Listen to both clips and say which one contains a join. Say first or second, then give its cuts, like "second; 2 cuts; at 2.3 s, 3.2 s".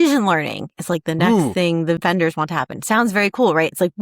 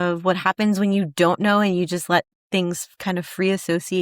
first; 1 cut; at 2.0 s